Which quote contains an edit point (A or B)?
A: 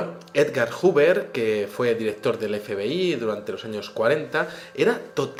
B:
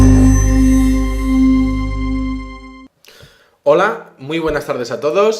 B